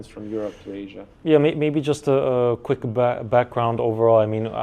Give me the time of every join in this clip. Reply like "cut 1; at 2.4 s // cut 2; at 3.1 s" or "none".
cut 1; at 1.1 s